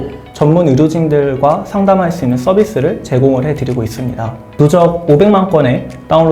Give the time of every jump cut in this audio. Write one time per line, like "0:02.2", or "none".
0:04.5

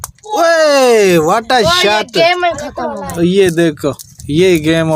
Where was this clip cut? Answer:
none

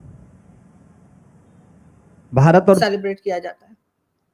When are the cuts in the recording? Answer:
0:02.8

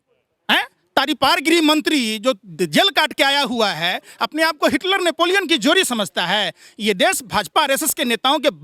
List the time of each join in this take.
none

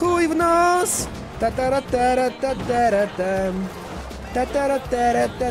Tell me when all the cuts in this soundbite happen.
none

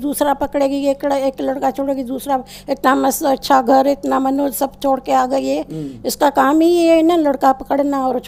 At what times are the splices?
none

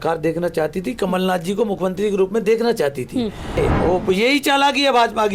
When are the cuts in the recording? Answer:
0:03.6

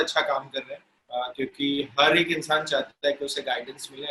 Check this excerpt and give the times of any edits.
none

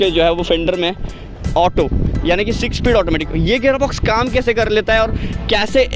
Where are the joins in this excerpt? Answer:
none

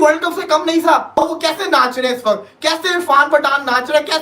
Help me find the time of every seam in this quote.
0:01.1

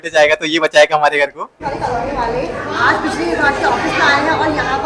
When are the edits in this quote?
0:01.5

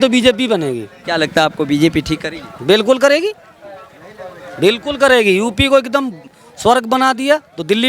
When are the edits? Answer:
0:00.9

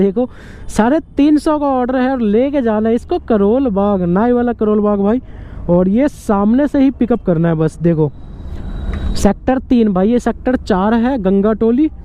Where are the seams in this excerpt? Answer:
none

